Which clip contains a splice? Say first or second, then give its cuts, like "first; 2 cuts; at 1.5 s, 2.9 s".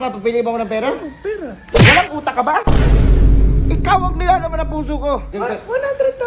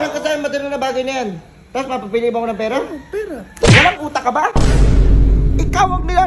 first; 1 cut; at 5.3 s